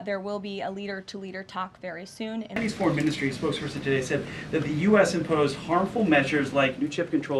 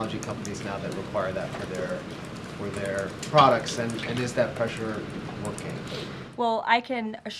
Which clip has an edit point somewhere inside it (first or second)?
first